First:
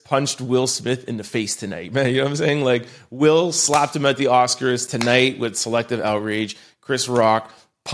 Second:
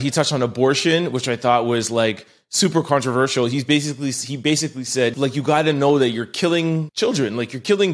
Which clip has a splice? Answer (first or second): second